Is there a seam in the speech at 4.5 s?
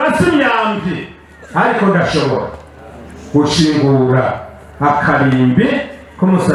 no; 0 cuts

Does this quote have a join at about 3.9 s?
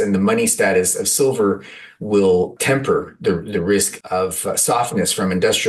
yes; 2 cuts; at 2.6 s, 3.9 s

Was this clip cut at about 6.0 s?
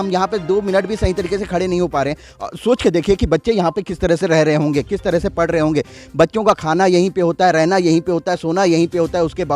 no; 1 cut; at 2.3 s

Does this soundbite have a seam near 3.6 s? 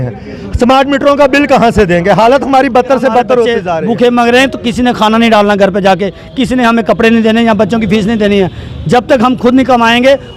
yes; 1 cut; at 3.6 s

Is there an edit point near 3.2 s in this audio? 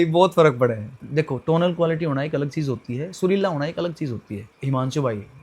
no; 2 cuts; at 1.0 s, 4.5 s

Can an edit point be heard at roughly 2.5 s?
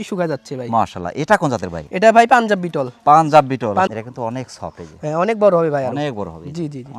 no; 1 cut; at 3.9 s

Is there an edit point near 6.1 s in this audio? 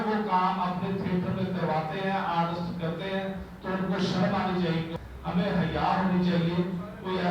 no; 1 cut; at 4.9 s

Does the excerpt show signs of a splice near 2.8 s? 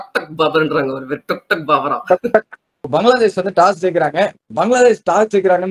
yes; 1 cut; at 2.8 s

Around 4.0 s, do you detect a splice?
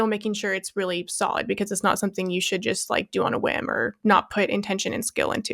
yes; 1 cut; at 4.0 s

